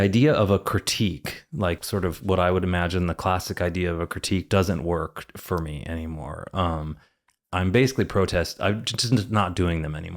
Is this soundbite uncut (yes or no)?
no